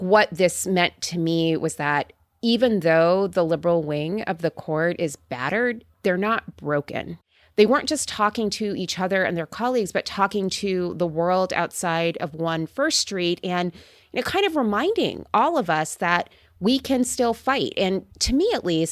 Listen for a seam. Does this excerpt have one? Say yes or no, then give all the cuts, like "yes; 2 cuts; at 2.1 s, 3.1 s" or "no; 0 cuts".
yes; 1 cut; at 7.2 s